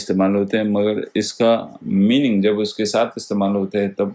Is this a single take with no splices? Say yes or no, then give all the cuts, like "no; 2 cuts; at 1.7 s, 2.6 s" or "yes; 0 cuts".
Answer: yes; 0 cuts